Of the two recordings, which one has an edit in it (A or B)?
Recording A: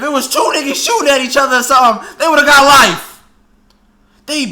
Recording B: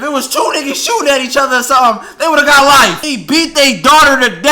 B